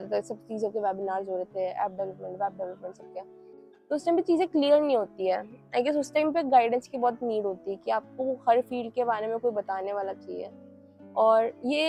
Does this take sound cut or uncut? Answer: uncut